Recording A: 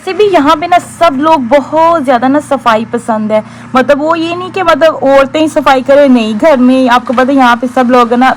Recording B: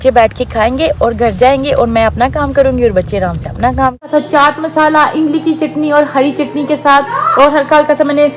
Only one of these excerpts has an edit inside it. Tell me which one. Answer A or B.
B